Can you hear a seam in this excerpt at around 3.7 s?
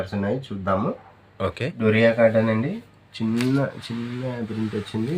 no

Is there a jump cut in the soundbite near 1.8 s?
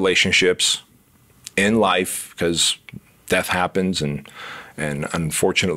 no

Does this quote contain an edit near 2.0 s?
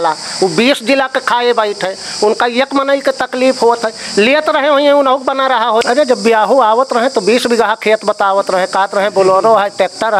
no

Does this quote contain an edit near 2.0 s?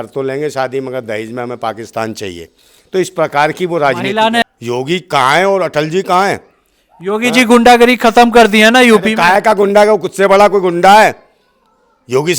no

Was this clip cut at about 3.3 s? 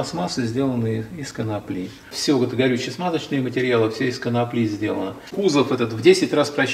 no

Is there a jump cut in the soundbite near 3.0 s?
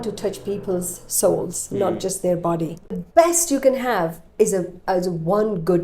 yes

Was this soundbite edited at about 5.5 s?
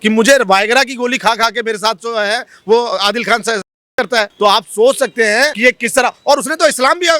yes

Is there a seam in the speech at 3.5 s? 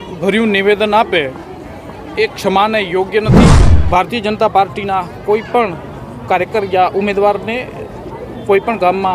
yes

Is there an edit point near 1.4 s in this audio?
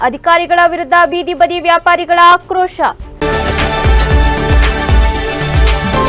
no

